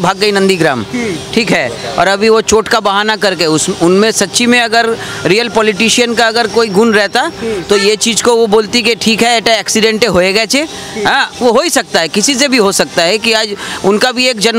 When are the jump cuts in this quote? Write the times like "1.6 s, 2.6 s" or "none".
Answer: none